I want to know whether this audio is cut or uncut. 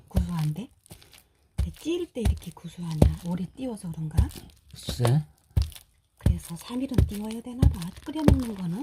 cut